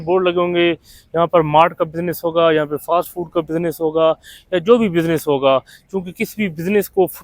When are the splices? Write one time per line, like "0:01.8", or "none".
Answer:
none